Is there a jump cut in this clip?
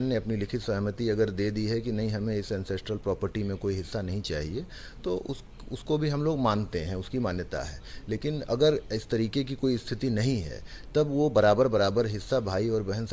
no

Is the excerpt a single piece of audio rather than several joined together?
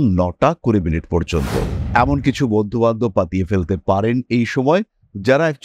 no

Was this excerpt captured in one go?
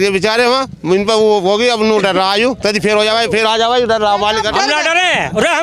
yes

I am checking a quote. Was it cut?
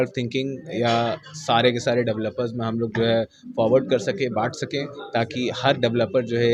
no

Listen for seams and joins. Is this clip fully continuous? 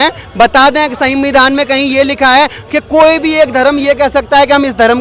yes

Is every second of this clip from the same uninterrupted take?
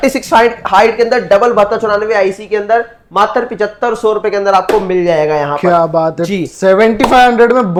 yes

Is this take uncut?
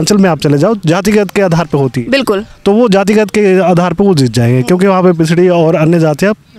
yes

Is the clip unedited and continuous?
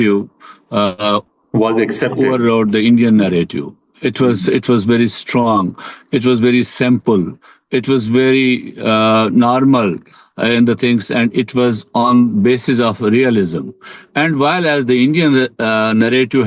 yes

